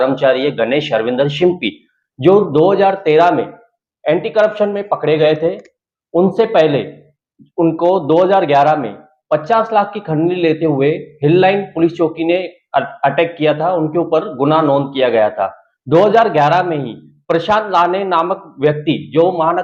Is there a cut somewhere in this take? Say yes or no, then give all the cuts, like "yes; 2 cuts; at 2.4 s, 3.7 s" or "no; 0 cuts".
no; 0 cuts